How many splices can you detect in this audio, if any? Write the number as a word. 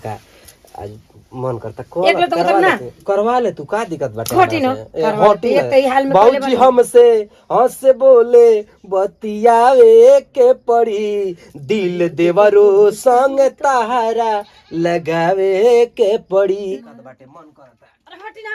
one